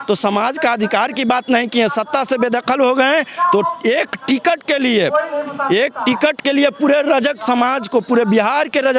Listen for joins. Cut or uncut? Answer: uncut